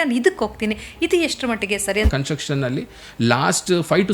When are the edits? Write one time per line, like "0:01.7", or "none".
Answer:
0:02.1